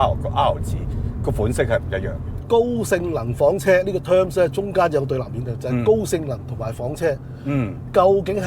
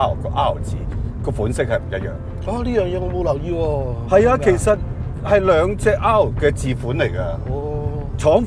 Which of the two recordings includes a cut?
first; 1 cut; at 2.4 s

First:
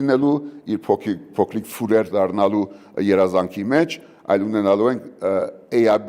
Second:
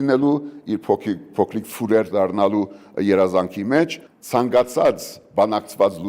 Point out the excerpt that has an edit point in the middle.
second; 1 cut; at 4.1 s

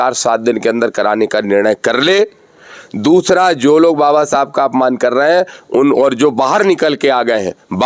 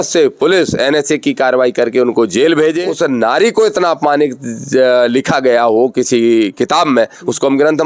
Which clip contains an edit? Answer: second; 1 cut; at 2.9 s

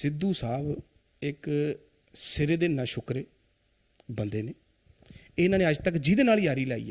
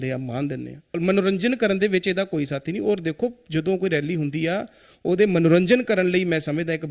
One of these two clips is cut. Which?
second; 1 cut; at 1.0 s

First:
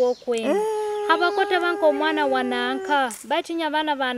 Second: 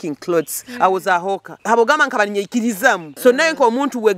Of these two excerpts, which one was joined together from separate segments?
second; 2 cuts; at 1.5 s, 3.1 s

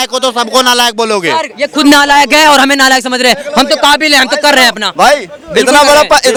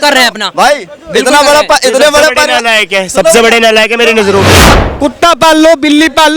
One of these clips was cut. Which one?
second; 1 cut; at 4.5 s

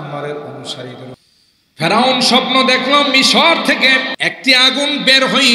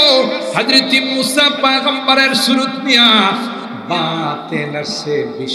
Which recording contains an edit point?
first; 2 cuts; at 1.1 s, 4.1 s

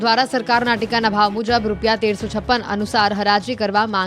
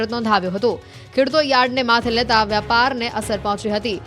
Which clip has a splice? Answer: first; 1 cut; at 1.4 s

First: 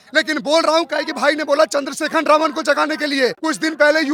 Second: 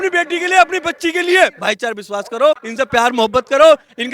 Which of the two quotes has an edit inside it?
second; 2 cuts; at 1.5 s, 2.7 s

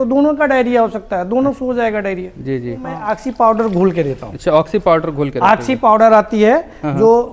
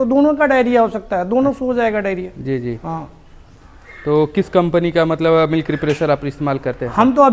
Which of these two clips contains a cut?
first; 1 cut; at 3.0 s

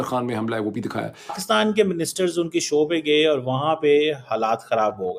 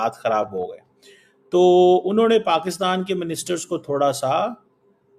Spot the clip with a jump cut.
first; 1 cut; at 1.5 s

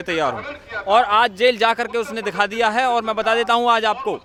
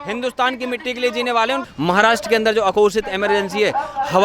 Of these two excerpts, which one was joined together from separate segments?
second; 1 cut; at 1.6 s

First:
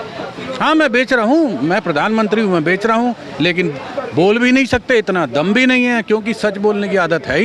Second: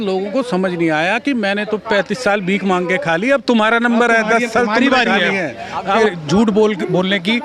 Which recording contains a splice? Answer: second; 1 cut; at 6.0 s

